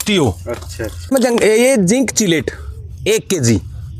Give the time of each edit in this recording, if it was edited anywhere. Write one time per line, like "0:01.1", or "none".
0:01.1